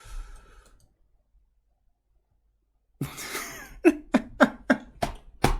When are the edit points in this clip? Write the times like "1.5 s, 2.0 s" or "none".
none